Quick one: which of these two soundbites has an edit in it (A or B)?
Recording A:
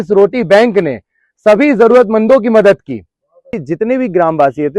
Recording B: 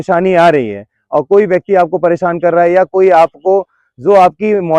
A